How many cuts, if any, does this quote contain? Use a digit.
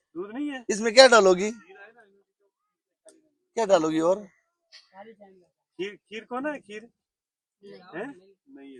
0